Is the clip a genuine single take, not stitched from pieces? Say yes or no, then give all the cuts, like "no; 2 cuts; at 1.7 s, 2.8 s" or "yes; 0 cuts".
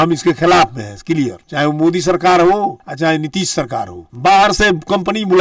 no; 1 cut; at 4.1 s